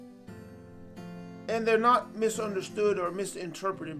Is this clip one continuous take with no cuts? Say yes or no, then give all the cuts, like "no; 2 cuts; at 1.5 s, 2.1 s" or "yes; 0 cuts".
no; 1 cut; at 1.4 s